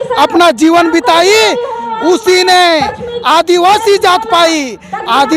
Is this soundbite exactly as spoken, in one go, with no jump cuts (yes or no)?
yes